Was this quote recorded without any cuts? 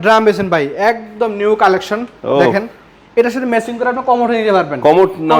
yes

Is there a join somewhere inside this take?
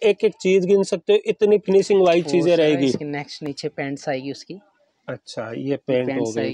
no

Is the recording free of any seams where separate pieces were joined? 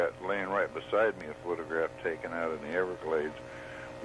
yes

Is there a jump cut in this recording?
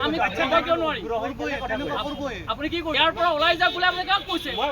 yes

